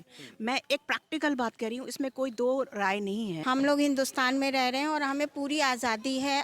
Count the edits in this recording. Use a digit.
1